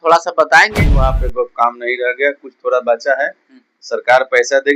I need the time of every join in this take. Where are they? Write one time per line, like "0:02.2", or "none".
0:01.0